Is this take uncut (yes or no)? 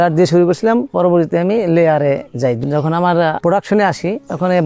no